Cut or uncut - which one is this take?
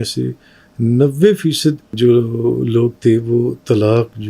cut